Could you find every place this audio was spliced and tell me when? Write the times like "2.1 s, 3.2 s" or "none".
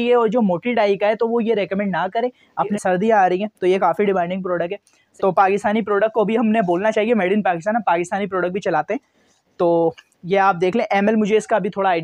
2.7 s, 5.0 s